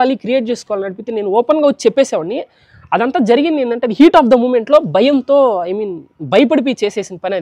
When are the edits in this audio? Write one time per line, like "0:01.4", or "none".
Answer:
none